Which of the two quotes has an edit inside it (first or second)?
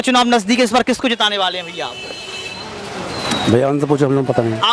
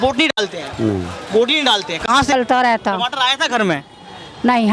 second